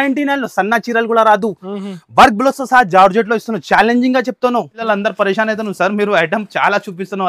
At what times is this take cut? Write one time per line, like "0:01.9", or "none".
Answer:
0:04.8